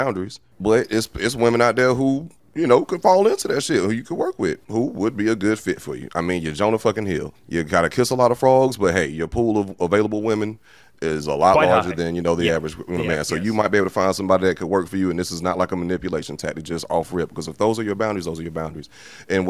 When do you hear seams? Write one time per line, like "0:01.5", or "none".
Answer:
none